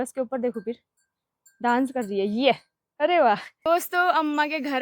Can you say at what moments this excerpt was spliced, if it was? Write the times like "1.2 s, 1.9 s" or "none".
3.5 s